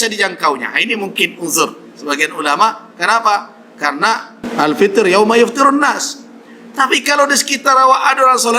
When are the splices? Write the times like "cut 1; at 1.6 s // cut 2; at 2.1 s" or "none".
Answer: cut 1; at 4.4 s